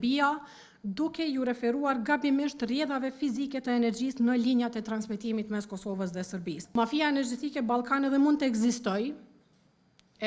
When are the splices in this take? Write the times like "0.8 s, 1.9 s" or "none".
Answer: 6.6 s